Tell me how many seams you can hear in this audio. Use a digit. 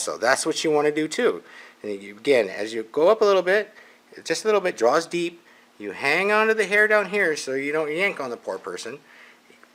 0